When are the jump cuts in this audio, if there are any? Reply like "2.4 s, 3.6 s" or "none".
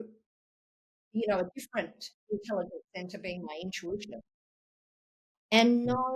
1.0 s